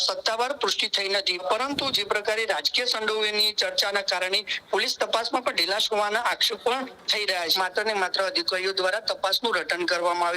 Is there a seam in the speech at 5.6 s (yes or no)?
no